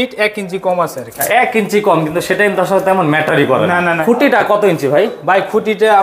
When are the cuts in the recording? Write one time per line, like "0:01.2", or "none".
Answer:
none